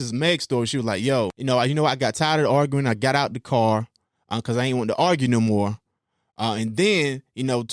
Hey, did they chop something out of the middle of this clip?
yes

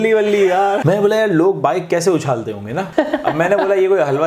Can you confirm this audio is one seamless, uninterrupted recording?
no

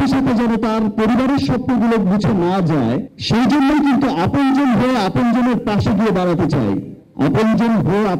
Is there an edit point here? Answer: yes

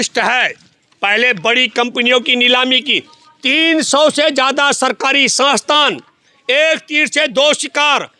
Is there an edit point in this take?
no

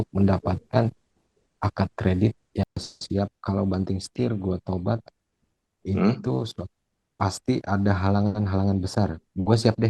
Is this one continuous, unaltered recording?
no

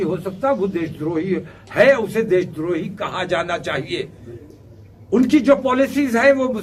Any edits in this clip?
no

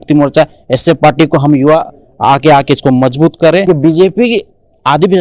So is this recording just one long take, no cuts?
no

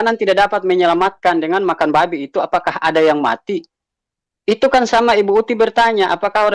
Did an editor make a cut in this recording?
no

